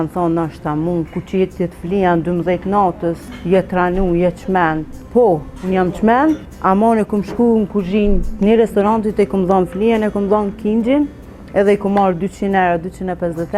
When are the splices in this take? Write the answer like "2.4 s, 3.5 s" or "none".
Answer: 3.3 s, 4.9 s, 6.5 s